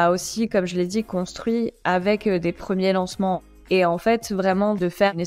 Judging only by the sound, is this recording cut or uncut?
cut